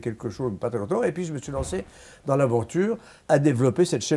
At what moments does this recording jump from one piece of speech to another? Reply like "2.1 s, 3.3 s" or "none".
3.1 s